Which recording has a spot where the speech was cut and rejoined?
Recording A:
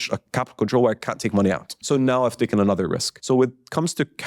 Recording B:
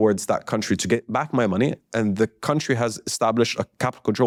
A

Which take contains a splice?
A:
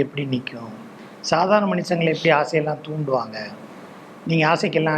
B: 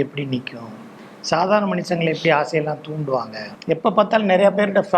B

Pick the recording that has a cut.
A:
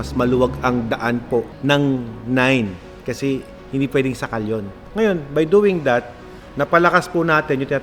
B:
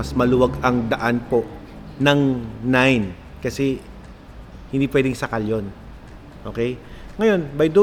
A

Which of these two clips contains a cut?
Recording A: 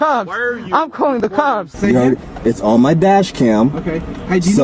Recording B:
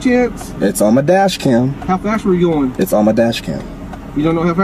A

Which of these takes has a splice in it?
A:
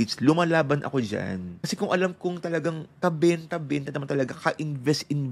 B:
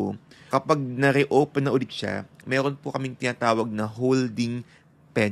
A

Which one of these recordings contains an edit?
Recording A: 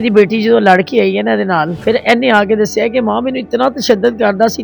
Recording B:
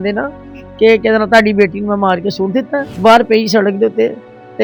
A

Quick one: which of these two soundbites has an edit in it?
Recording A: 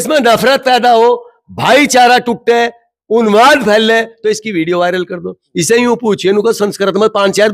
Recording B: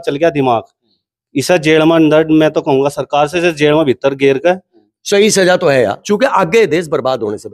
B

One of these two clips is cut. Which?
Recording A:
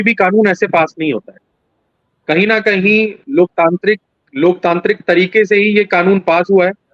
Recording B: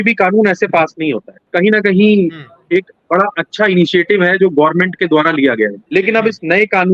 B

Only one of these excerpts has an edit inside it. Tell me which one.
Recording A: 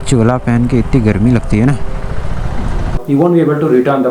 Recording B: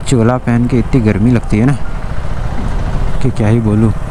A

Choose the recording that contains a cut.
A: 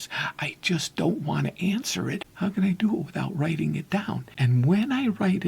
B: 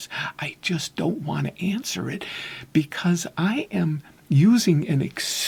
A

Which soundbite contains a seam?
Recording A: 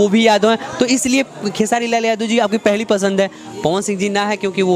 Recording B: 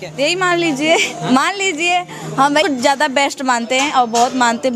B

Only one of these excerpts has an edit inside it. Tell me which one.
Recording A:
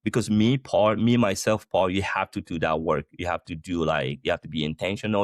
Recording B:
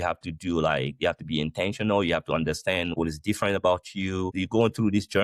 B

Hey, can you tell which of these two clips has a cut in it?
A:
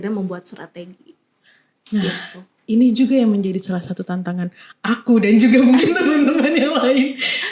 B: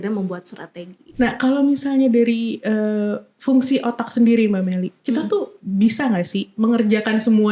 B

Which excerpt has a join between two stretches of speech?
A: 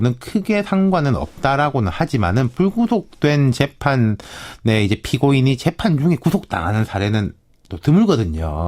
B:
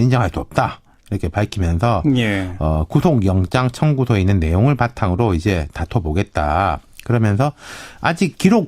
B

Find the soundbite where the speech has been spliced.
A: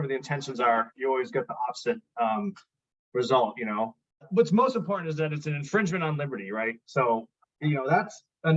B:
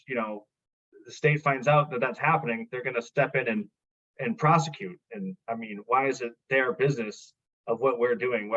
A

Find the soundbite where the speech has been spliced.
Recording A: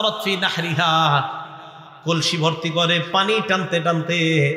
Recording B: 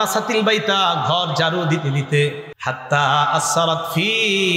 B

